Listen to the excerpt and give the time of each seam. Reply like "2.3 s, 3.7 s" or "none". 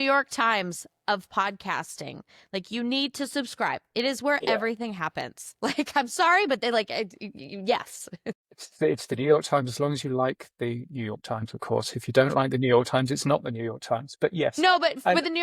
none

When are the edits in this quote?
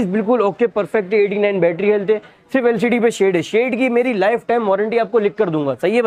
none

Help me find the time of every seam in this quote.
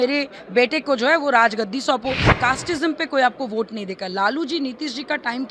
2.3 s

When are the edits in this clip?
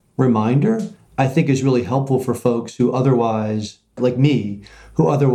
1.0 s, 4.0 s

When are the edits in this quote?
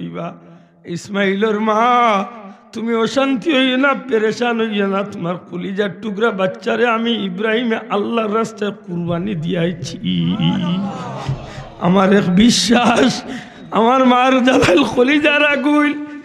none

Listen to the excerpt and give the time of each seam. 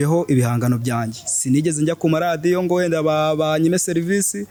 none

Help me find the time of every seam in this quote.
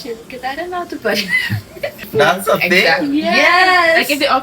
2.0 s

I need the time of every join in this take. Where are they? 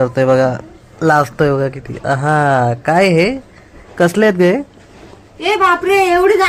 none

